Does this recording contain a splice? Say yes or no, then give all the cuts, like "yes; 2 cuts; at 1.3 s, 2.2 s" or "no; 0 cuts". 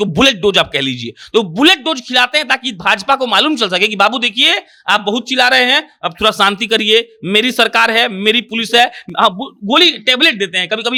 no; 0 cuts